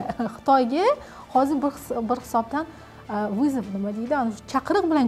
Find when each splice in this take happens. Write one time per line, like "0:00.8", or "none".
none